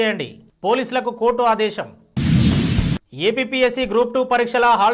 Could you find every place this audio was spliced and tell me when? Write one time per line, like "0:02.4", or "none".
none